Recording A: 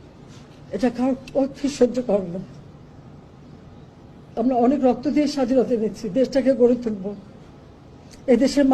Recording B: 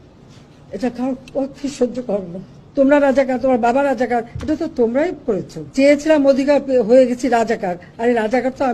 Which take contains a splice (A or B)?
B